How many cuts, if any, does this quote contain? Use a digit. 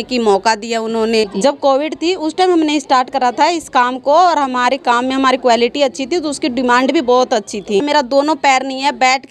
2